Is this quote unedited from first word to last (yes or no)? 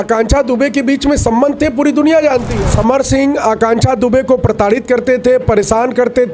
no